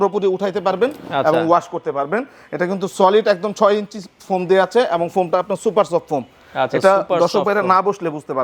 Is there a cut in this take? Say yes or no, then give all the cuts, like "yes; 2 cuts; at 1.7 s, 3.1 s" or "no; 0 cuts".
no; 0 cuts